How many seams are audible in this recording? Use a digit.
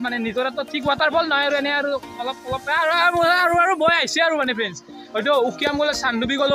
1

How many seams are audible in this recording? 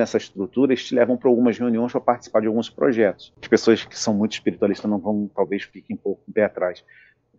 1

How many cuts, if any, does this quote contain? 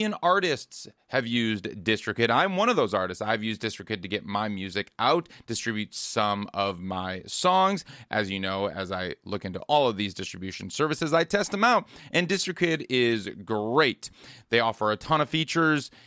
0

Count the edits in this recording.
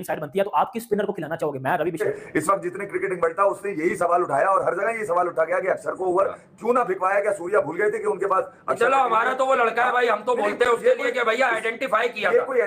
1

